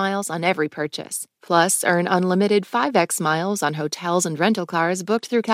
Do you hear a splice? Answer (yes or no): no